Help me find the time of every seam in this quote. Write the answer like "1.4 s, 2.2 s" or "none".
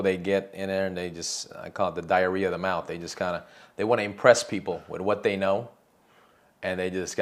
none